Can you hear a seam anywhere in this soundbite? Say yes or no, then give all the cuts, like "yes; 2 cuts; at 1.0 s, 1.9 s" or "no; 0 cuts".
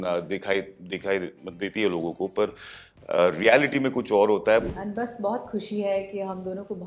yes; 1 cut; at 4.7 s